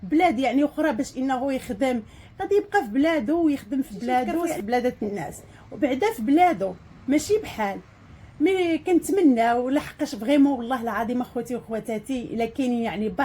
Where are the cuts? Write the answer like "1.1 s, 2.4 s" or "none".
none